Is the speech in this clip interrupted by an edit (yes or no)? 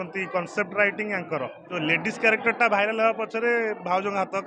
yes